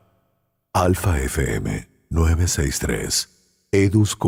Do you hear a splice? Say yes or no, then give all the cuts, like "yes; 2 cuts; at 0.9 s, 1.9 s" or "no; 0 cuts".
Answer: no; 0 cuts